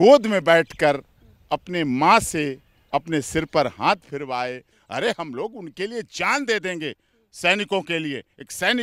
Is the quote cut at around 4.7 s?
yes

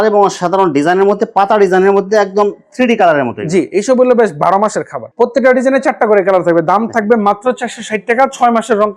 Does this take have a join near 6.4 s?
no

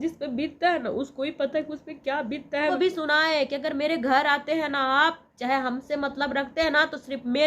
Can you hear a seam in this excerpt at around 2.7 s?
yes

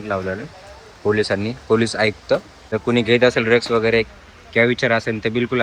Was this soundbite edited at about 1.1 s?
no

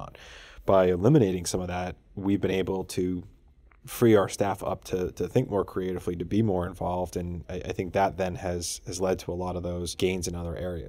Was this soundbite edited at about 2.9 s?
no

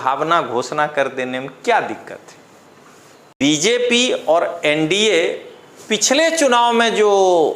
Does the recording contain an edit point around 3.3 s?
yes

